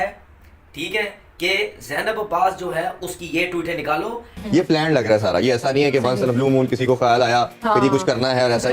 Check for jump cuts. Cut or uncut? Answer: cut